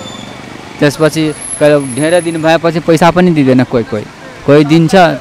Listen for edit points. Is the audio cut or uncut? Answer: uncut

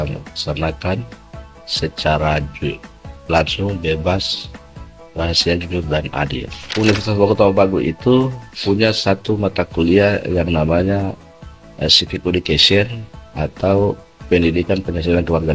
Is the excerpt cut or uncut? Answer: cut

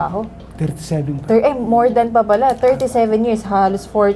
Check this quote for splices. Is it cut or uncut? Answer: uncut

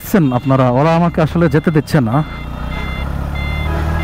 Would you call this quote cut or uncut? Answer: uncut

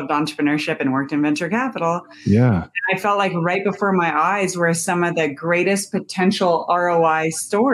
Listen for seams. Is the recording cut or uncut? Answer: uncut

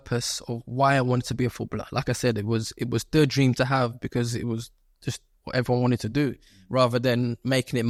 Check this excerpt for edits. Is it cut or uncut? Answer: uncut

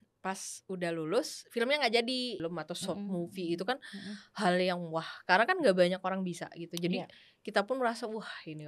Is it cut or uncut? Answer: cut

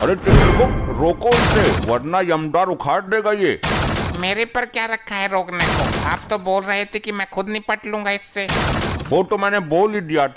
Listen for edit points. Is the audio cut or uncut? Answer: uncut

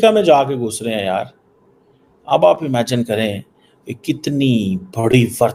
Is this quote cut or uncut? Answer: uncut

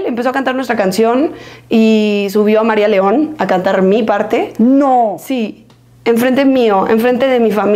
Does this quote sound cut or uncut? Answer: uncut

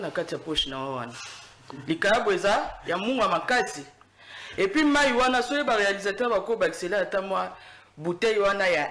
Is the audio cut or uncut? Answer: uncut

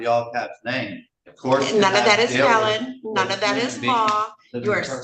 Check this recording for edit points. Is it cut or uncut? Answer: uncut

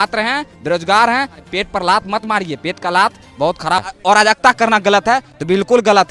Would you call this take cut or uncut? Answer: cut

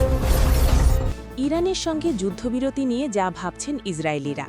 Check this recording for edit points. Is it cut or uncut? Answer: cut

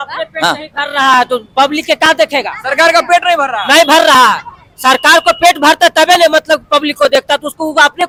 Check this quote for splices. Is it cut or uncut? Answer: uncut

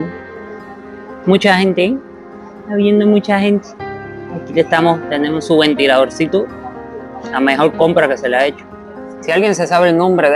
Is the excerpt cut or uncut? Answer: cut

